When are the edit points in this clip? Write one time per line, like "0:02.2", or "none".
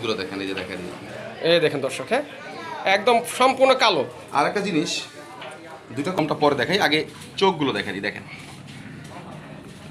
0:06.2